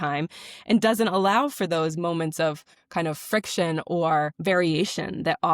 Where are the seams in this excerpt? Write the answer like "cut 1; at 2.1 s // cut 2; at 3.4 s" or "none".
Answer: cut 1; at 2.7 s